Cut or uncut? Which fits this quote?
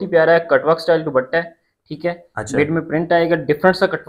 uncut